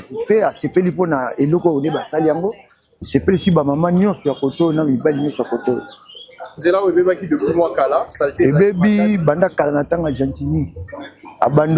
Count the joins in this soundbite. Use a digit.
0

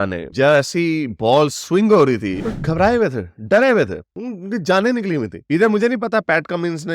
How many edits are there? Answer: 1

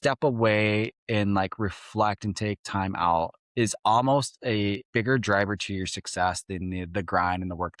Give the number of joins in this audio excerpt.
2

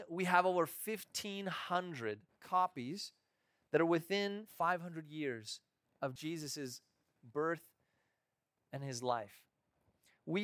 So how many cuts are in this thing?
3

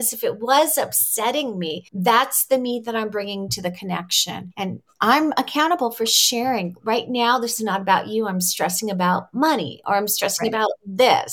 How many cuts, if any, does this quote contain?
2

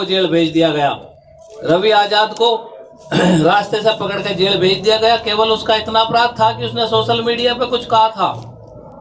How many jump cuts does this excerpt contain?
0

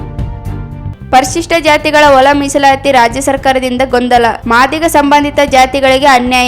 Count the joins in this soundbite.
1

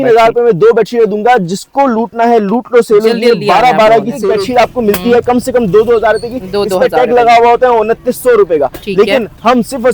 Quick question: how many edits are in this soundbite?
1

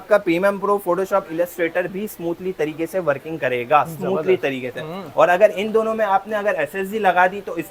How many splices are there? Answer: 0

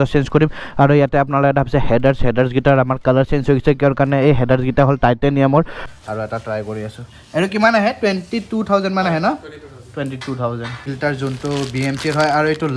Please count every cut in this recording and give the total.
2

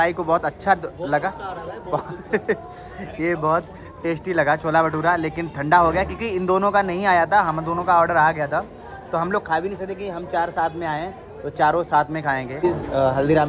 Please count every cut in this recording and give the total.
1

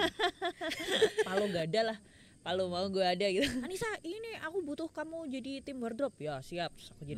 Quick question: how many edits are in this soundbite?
2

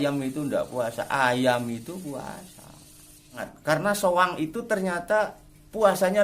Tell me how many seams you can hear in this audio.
1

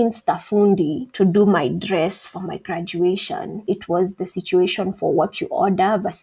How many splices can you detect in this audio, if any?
1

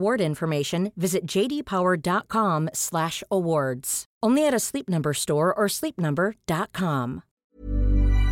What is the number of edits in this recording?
1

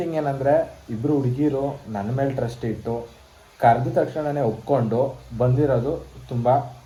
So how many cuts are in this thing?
0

